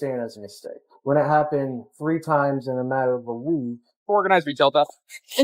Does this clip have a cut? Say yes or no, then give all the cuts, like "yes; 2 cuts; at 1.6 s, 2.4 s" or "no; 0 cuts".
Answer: yes; 1 cut; at 4.0 s